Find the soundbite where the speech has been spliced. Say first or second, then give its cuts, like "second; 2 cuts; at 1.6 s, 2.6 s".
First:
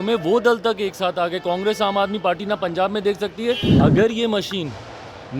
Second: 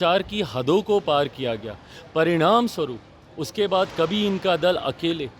first; 1 cut; at 3.7 s